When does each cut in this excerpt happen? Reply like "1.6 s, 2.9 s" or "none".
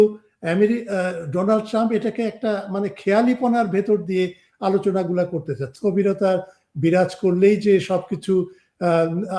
5.7 s